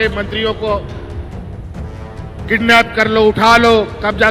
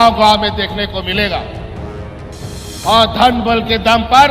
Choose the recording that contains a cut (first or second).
second